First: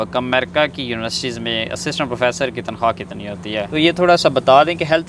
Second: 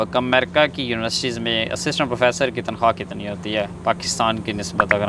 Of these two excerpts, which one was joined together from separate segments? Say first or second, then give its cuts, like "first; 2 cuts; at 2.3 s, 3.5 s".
first; 1 cut; at 3.7 s